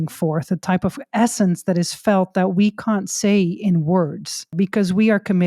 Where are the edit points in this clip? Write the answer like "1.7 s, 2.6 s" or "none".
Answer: 4.5 s

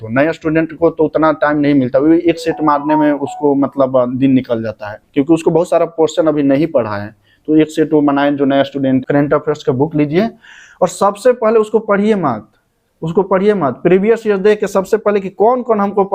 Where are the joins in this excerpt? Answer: 9.0 s

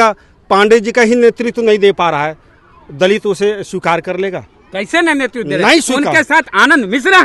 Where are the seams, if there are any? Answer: none

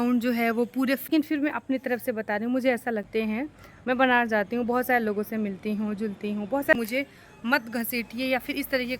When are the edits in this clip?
1.1 s, 3.1 s, 6.7 s

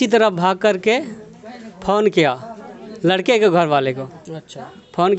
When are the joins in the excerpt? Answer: none

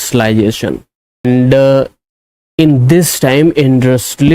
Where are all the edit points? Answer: 1.2 s

